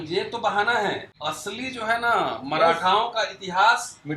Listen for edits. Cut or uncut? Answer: cut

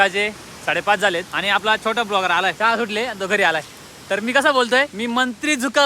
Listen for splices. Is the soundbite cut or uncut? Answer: cut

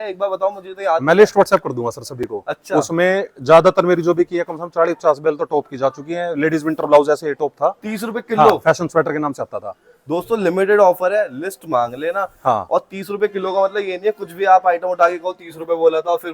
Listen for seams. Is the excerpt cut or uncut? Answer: uncut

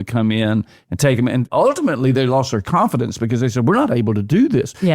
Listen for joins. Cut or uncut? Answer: cut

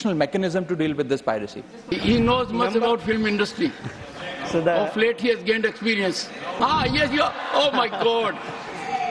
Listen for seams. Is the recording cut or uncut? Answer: cut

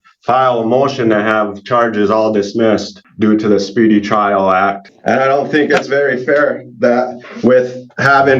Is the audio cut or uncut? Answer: cut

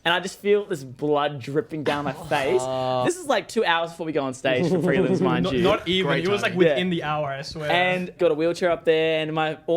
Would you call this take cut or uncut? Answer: cut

